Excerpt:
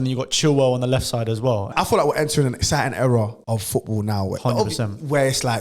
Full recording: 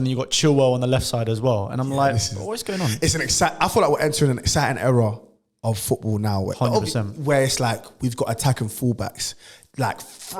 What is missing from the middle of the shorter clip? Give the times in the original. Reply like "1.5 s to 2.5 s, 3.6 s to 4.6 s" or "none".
1.7 s to 3.5 s, 5.2 s to 5.5 s